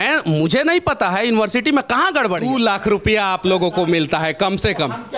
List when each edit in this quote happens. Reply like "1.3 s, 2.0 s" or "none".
2.4 s

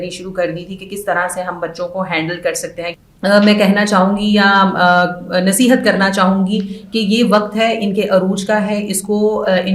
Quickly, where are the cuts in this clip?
2.9 s

